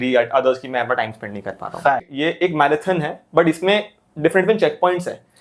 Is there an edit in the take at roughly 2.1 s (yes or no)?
yes